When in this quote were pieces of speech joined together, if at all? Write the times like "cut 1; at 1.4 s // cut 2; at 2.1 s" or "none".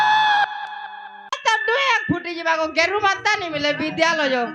cut 1; at 1.5 s

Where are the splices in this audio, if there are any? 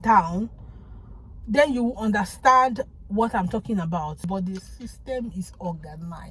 cut 1; at 4.3 s

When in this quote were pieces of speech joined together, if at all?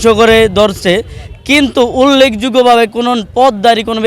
none

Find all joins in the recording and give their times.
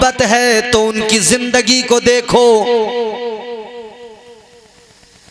none

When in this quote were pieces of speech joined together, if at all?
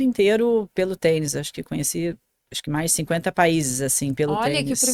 none

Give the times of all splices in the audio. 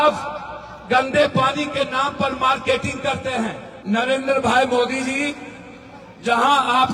cut 1; at 3.7 s

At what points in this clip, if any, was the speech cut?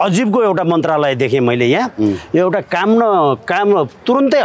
none

